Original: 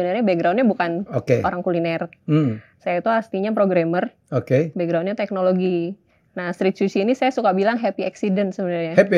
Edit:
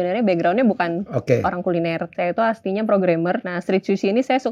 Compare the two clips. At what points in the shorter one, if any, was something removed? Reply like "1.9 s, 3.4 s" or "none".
2.1 s, 3.5 s